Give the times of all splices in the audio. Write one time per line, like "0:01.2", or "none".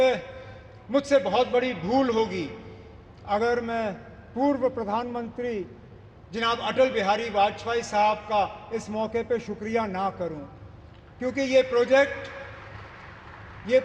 none